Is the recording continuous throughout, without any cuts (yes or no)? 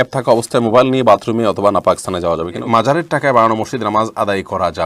no